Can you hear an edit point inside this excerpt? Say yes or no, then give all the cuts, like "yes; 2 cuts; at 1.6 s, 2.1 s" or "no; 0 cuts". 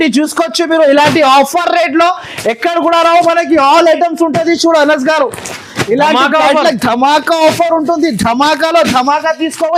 no; 0 cuts